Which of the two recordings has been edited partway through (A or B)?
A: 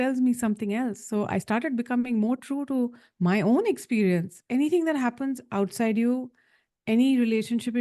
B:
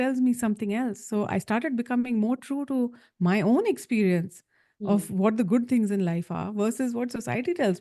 A